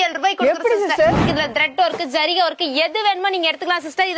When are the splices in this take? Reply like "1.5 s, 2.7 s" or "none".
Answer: 1.2 s